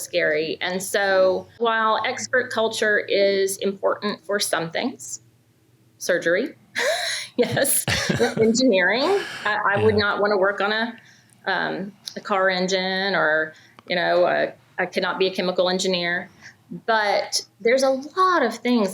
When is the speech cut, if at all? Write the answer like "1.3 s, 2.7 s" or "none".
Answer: 1.6 s